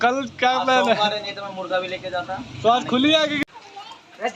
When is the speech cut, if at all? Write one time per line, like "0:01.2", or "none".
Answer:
0:03.4